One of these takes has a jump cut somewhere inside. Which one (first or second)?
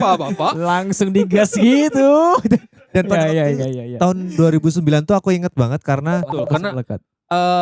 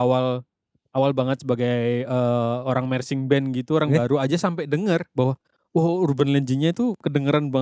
first